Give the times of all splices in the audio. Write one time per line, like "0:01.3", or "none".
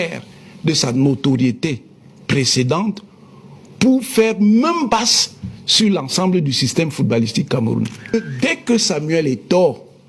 0:08.0